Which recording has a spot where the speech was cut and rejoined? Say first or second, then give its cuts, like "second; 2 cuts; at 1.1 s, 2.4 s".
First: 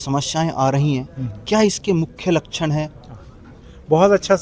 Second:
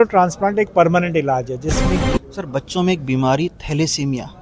second; 1 cut; at 2.0 s